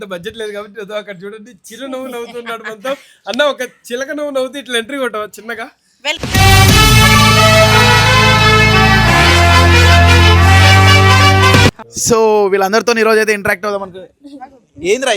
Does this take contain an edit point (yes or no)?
yes